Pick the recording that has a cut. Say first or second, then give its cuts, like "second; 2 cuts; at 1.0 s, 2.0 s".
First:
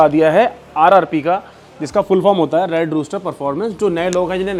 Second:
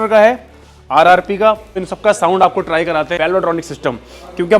second; 2 cuts; at 1.7 s, 3.1 s